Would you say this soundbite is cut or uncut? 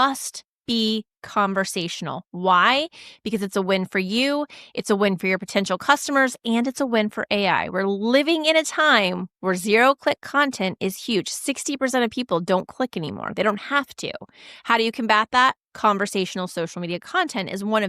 uncut